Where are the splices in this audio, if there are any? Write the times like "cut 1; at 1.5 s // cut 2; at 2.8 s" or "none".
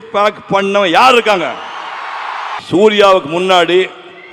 cut 1; at 2.6 s